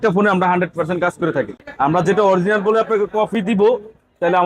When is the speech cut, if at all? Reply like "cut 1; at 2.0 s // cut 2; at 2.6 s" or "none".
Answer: cut 1; at 1.6 s